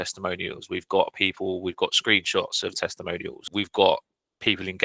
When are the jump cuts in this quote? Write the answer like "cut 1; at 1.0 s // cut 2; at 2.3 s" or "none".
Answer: cut 1; at 3.4 s

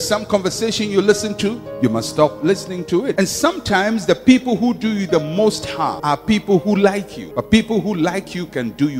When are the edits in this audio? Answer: cut 1; at 3.1 s // cut 2; at 6.0 s // cut 3; at 7.2 s

